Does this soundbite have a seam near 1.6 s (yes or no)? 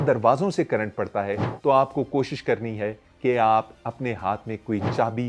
no